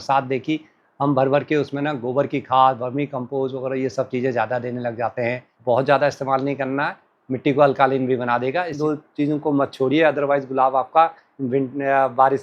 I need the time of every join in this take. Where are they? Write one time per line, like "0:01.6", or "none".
0:05.5
0:08.7